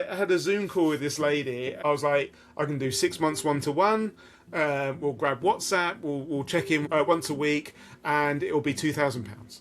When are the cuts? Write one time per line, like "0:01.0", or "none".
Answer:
0:01.8
0:06.8